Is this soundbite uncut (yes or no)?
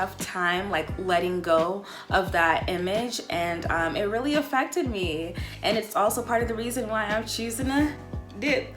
yes